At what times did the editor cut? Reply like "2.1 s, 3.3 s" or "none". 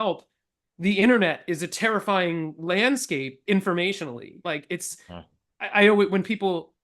4.4 s